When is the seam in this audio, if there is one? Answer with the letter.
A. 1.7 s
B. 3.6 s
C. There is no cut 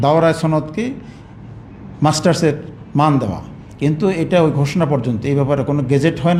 C